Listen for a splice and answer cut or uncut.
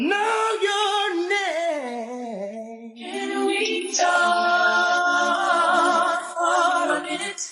uncut